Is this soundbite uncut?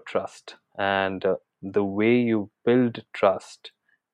yes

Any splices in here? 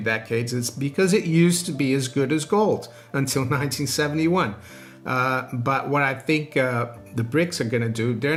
no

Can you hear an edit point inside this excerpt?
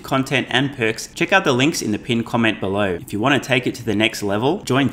yes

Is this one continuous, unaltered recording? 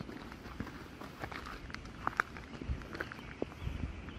yes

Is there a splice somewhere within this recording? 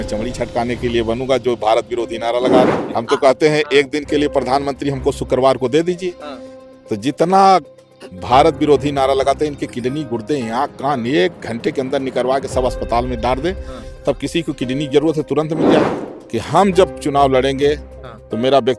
yes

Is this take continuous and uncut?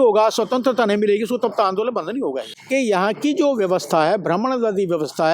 no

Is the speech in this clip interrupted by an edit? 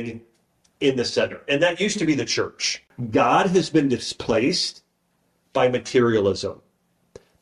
yes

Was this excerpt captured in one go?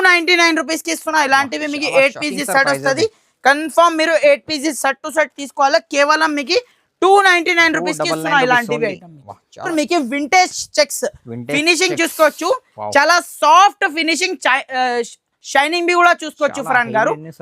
no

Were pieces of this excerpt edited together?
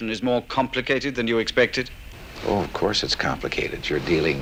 no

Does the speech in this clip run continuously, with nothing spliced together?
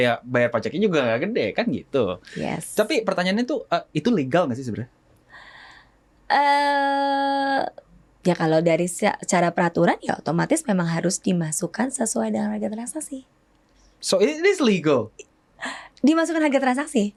yes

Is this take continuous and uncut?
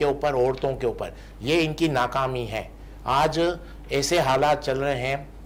yes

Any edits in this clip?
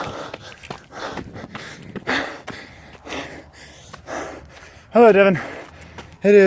yes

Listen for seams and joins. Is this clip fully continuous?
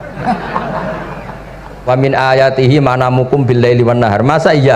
no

